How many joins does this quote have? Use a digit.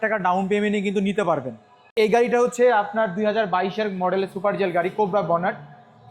1